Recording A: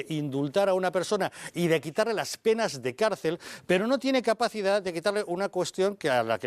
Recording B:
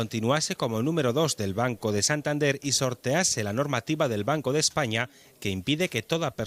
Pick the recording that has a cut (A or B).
A